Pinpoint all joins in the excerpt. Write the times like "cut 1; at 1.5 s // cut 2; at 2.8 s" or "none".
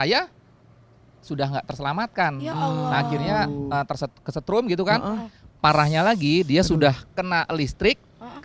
none